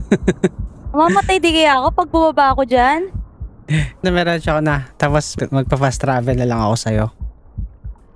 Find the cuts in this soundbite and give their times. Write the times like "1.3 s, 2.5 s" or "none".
4.0 s, 5.3 s